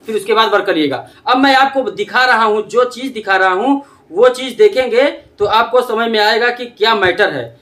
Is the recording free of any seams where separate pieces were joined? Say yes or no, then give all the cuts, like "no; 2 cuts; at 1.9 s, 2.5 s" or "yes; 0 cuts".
no; 1 cut; at 1.1 s